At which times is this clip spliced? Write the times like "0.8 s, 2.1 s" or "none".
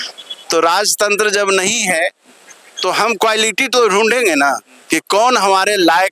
none